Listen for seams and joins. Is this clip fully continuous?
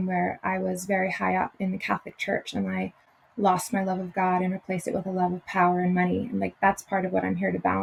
yes; 0 cuts

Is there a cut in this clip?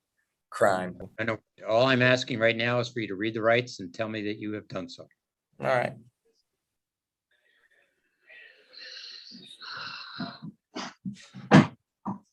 no; 0 cuts

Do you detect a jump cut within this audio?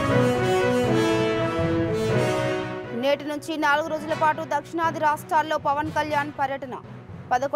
yes; 1 cut; at 2.5 s

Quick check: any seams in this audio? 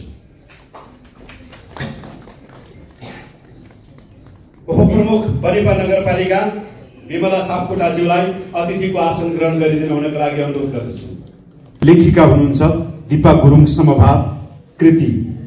yes; 1 cut; at 11.8 s

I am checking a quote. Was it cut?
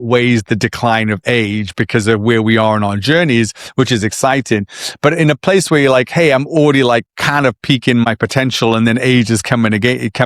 yes; 1 cut; at 8.0 s

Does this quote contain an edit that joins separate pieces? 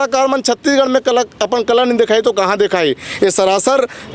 no; 0 cuts

